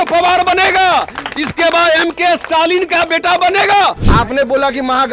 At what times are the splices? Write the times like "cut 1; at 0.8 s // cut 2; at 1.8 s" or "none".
cut 1; at 4.0 s